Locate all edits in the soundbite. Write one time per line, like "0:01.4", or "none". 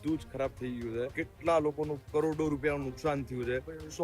0:01.2